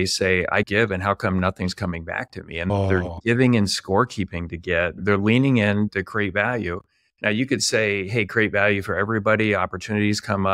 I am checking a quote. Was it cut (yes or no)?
yes